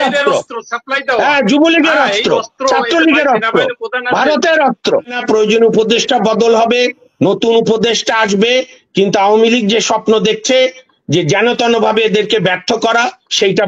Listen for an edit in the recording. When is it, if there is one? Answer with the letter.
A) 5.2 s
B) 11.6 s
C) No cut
A